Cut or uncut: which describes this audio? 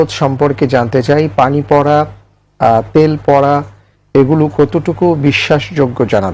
uncut